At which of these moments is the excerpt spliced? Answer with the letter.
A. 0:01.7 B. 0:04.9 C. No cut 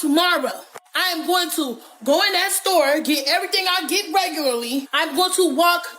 B